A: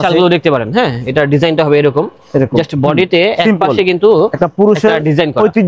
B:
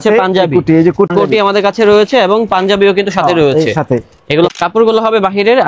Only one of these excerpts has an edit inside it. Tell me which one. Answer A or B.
B